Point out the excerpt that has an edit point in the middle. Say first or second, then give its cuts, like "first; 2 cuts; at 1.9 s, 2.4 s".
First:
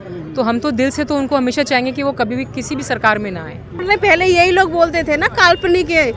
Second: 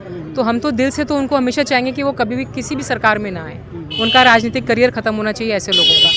first; 1 cut; at 3.8 s